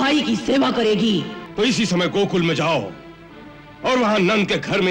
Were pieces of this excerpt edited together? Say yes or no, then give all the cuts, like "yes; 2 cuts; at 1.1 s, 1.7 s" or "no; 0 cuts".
yes; 1 cut; at 1.4 s